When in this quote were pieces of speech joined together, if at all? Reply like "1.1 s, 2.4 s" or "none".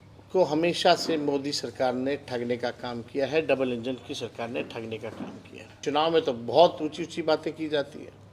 5.8 s